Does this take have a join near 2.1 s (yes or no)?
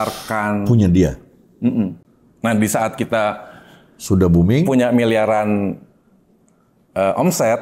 yes